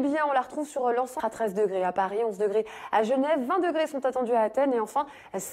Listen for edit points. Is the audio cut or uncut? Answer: uncut